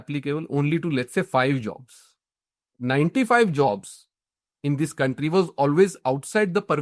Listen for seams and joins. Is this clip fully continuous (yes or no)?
yes